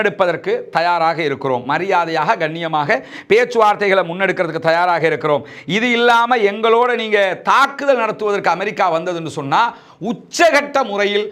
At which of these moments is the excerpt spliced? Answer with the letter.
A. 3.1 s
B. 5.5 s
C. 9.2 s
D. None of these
D